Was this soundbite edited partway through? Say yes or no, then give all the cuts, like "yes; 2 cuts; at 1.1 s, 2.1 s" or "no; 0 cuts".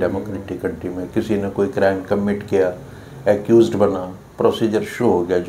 no; 0 cuts